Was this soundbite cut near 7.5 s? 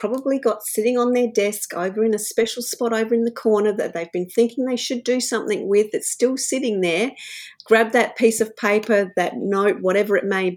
yes; 1 cut; at 7.5 s

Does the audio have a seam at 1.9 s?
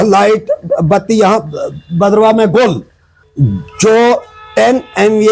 no; 1 cut; at 3.4 s

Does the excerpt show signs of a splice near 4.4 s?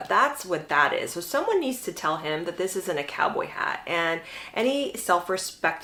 no; 0 cuts

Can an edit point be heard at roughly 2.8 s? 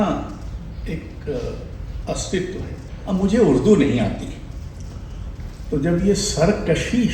yes; 1 cut; at 2.8 s

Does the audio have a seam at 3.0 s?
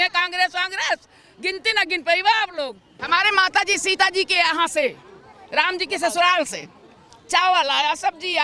yes; 1 cut; at 3.0 s

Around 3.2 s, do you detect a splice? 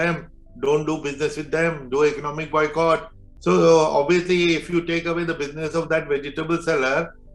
yes; 1 cut; at 3.2 s

